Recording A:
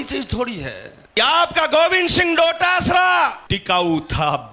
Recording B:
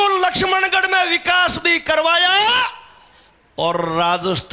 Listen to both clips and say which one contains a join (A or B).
A